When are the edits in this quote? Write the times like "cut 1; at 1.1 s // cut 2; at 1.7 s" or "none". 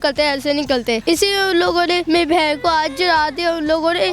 cut 1; at 1.0 s // cut 2; at 2.0 s